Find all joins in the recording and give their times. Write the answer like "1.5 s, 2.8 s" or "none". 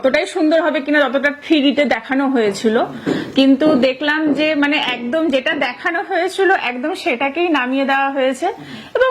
none